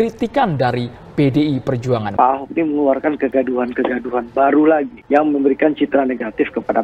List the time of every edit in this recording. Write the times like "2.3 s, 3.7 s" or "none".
2.1 s